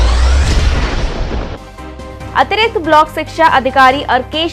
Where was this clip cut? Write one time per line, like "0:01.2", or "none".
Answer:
0:02.0